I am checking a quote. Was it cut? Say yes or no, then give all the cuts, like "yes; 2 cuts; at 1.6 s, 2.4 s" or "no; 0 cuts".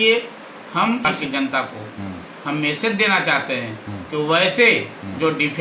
yes; 1 cut; at 1.1 s